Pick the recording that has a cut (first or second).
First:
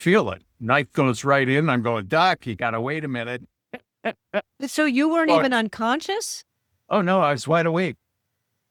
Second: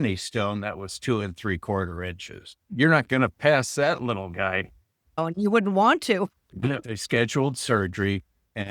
second